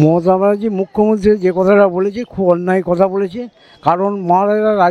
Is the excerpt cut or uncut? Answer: uncut